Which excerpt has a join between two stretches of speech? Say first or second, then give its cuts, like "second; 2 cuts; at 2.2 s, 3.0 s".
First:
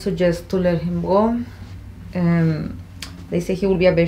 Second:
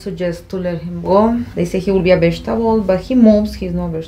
second; 1 cut; at 1.5 s